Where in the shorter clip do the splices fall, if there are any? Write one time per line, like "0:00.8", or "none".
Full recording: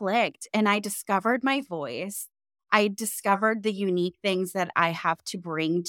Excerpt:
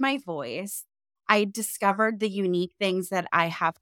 none